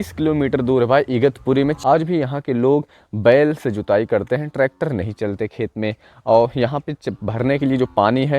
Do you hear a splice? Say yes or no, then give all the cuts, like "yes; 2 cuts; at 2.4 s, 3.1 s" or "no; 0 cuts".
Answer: yes; 1 cut; at 1.8 s